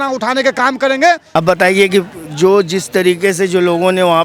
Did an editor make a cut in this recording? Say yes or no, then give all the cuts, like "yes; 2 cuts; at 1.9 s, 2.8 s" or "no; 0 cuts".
yes; 1 cut; at 1.2 s